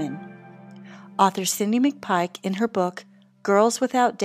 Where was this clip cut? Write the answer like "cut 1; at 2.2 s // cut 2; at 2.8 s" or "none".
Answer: none